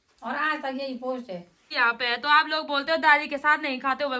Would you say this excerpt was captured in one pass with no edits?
no; 1 cut; at 1.7 s

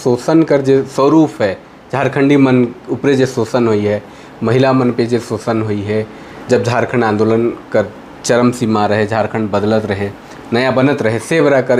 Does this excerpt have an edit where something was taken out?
no; 0 cuts

